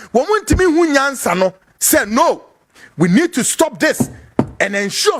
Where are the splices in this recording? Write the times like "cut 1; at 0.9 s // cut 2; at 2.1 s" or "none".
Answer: none